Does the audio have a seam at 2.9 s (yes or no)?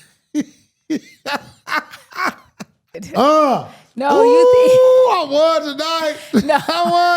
yes